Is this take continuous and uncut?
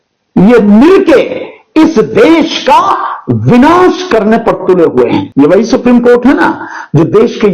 no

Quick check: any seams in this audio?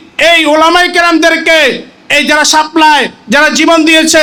no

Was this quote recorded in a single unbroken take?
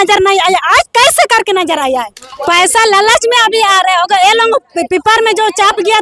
no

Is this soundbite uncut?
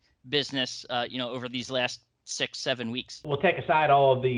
no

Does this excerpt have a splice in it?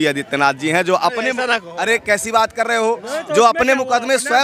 no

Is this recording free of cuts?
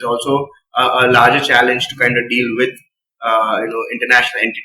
yes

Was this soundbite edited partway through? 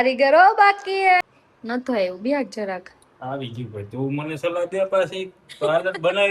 yes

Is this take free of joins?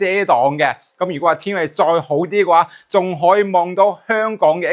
yes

